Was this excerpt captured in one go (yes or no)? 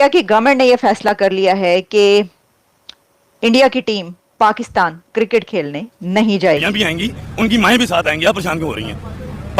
no